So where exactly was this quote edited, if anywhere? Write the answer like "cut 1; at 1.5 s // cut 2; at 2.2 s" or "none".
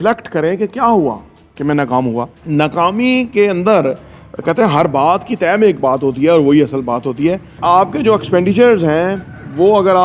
cut 1; at 2.4 s // cut 2; at 7.5 s